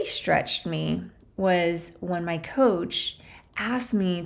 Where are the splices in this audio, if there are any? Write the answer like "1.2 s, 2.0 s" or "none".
none